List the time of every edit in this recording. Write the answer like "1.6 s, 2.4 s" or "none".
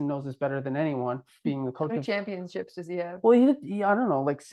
none